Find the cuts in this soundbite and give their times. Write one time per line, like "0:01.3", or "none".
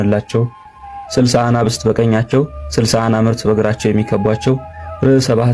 none